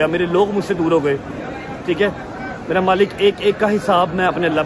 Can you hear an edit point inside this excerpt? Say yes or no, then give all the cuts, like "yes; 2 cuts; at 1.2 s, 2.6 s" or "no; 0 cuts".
no; 0 cuts